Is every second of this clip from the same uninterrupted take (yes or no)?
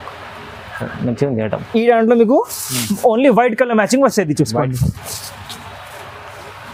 yes